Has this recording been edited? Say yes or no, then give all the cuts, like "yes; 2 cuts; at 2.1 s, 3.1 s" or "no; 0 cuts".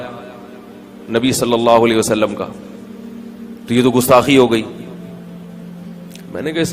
no; 0 cuts